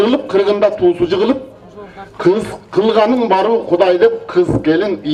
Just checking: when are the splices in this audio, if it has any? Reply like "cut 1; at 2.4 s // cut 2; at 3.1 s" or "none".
none